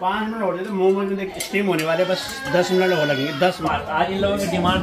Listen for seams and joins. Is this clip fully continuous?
no; 1 cut; at 3.6 s

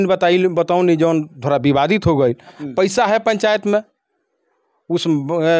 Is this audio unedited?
no; 1 cut; at 2.6 s

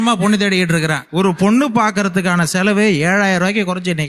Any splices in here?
yes; 1 cut; at 1.1 s

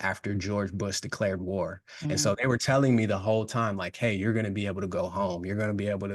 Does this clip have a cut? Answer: no; 0 cuts

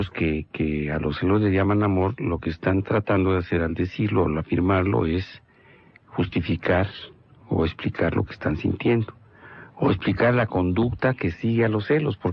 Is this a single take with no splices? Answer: no; 1 cut; at 8.6 s

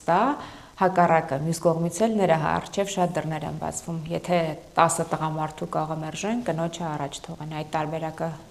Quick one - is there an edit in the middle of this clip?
no; 0 cuts

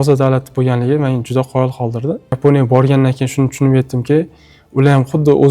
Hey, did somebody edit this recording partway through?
yes; 1 cut; at 2.4 s

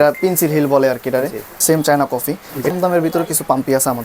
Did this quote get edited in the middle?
yes; 2 cuts; at 1.4 s, 2.7 s

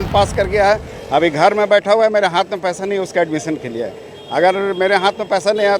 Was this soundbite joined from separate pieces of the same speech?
no; 0 cuts

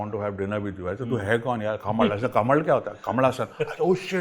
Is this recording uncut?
yes; 0 cuts

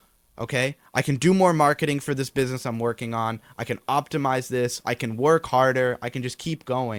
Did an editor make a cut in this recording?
no; 0 cuts

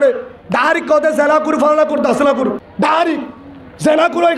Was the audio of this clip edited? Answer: yes; 1 cut; at 2.7 s

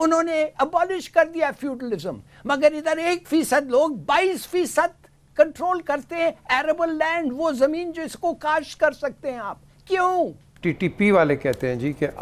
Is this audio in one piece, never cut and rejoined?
no; 1 cut; at 10.5 s

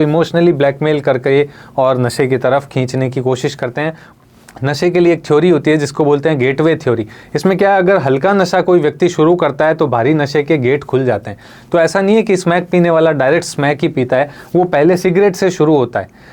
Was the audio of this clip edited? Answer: yes; 1 cut; at 4.0 s

